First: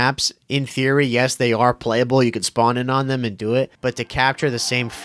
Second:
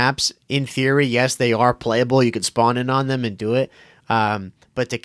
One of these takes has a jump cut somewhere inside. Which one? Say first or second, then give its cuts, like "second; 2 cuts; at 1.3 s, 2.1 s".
first; 1 cut; at 3.7 s